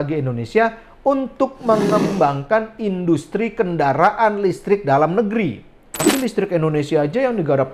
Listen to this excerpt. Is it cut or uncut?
cut